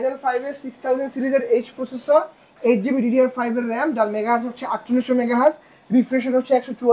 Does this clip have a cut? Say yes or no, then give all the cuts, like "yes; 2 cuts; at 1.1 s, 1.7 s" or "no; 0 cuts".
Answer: no; 0 cuts